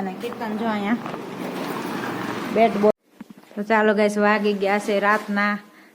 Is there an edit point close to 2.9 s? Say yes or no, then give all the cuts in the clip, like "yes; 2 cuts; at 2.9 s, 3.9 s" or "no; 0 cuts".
yes; 1 cut; at 2.9 s